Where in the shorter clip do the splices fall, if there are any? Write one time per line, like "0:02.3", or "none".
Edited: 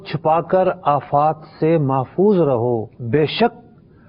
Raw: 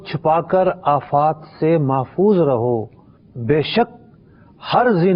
0:02.9